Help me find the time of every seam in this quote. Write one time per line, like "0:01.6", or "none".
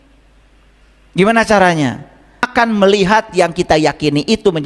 0:02.4